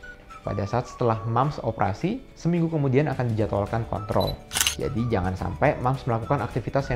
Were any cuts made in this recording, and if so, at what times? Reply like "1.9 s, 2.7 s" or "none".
4.6 s